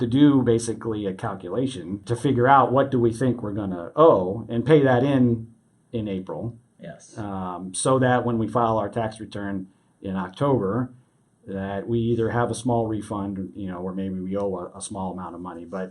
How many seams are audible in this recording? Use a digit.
1